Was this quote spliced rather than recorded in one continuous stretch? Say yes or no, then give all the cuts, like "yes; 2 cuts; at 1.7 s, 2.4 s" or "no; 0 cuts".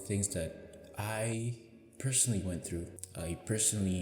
yes; 1 cut; at 3.0 s